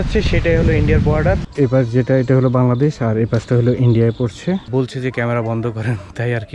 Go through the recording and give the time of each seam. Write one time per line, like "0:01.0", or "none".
0:01.5
0:04.7